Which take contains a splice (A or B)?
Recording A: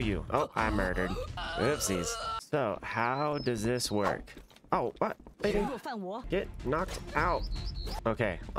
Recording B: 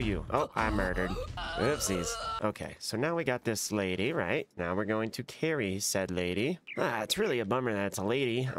A